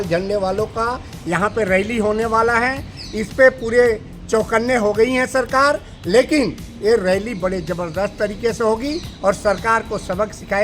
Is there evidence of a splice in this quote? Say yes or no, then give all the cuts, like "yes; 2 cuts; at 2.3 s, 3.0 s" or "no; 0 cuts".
no; 0 cuts